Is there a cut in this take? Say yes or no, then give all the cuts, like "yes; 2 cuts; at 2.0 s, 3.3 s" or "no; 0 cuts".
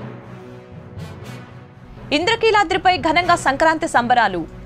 yes; 1 cut; at 1.7 s